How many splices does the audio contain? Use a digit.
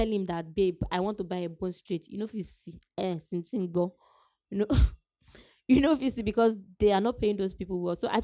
0